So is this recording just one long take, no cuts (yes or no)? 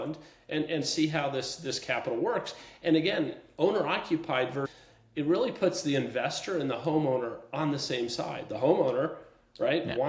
no